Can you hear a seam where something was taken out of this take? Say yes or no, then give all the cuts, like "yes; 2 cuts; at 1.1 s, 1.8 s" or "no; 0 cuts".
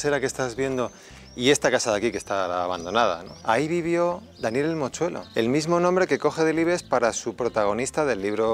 yes; 2 cuts; at 3.3 s, 5.2 s